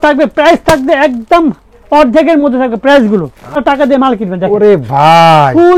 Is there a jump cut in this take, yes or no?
yes